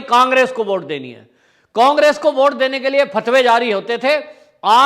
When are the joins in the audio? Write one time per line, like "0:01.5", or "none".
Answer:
none